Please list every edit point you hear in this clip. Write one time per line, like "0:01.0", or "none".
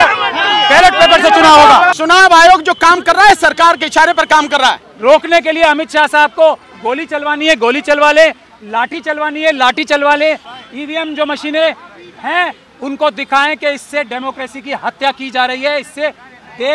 0:01.9
0:04.9
0:10.5

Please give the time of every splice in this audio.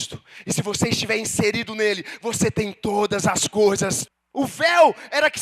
0:04.0

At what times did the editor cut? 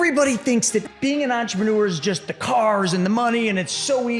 0:00.9

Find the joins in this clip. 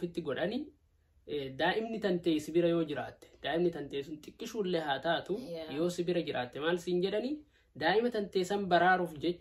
none

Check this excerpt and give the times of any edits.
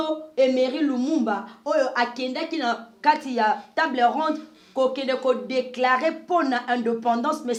none

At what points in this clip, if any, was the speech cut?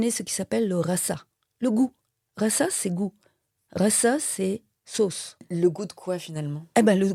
none

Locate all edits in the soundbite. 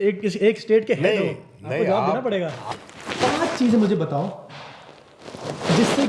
0:02.6

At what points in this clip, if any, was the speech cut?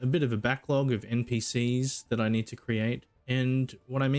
0:03.1

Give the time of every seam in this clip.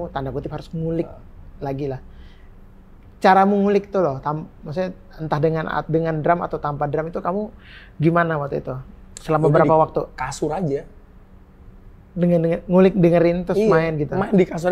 none

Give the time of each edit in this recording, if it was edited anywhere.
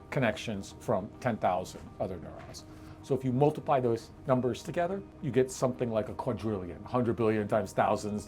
0:05.2

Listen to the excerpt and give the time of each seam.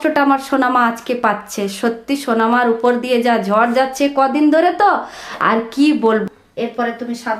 0:06.2

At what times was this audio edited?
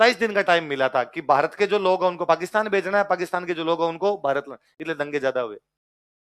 none

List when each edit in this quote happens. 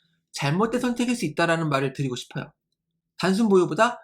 0:03.0

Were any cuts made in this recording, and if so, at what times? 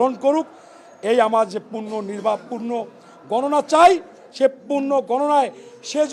none

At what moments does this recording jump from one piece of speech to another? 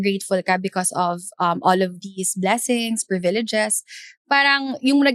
none

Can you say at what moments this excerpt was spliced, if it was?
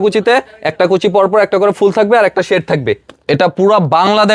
0:03.1

